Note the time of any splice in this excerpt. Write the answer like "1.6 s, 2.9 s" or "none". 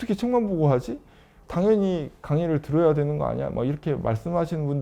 1.4 s